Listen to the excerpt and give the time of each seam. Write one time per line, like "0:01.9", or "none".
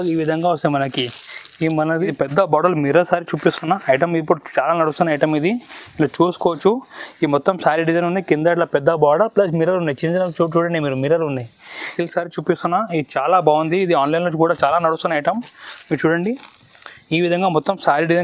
0:02.0
0:11.9